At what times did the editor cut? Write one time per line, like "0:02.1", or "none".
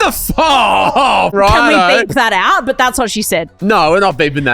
0:01.3
0:03.5